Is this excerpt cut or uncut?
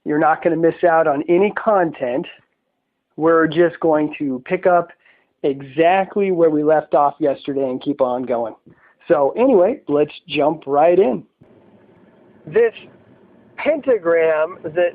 cut